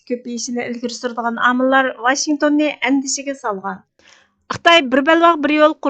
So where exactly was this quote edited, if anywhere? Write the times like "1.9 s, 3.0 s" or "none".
4.3 s